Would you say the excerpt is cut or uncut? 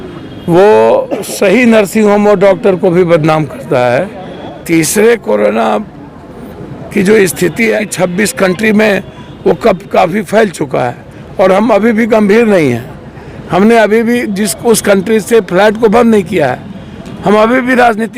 cut